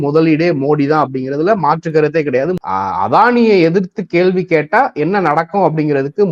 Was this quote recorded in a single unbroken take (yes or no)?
no